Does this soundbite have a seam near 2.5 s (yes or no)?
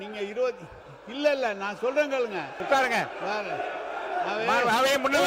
yes